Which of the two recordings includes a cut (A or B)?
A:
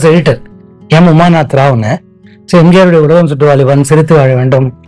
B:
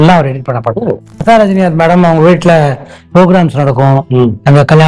B